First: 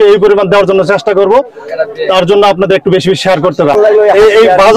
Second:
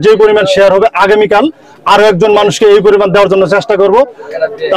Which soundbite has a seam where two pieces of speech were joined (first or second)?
first